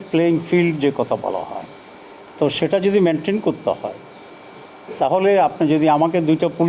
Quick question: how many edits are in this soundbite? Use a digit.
0